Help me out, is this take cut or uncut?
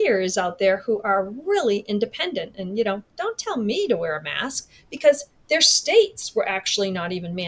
uncut